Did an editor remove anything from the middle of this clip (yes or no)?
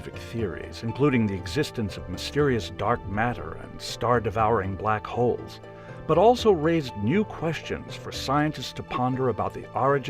yes